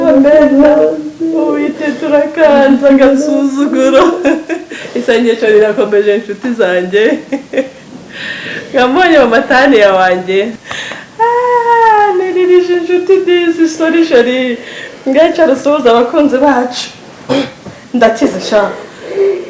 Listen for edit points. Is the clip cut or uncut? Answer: cut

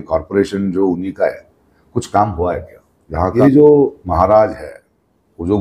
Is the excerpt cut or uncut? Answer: cut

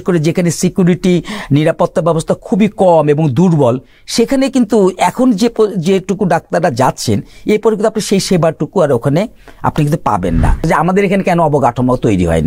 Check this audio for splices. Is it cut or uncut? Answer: cut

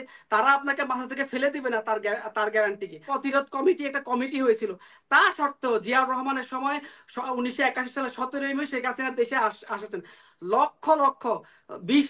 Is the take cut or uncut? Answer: cut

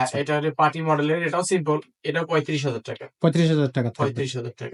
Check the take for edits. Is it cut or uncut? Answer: uncut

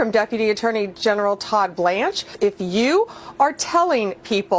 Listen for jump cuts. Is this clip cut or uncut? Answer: cut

